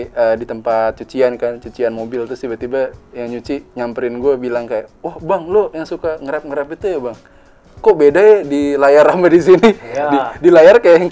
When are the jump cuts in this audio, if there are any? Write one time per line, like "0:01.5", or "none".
none